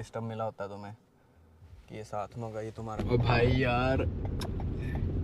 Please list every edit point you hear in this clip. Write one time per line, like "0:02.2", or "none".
0:03.0